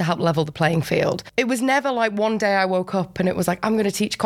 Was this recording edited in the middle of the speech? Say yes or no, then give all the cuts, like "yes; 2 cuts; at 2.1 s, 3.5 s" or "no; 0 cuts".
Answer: yes; 1 cut; at 1.2 s